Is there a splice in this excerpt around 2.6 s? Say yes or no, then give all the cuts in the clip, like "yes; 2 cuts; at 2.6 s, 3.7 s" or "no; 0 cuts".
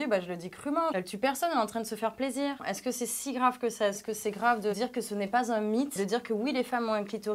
yes; 2 cuts; at 0.9 s, 2.6 s